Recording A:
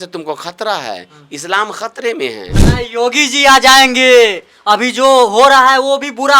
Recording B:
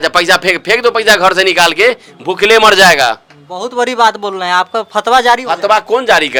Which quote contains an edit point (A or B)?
A